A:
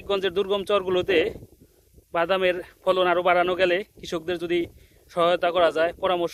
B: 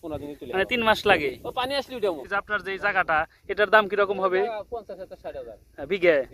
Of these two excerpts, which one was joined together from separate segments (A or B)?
B